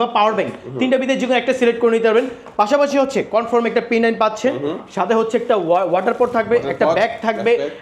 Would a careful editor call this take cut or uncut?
uncut